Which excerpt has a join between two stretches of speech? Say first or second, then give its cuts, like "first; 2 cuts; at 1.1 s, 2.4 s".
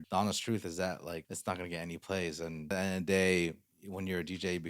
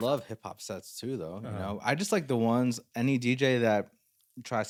first; 2 cuts; at 1.3 s, 2.7 s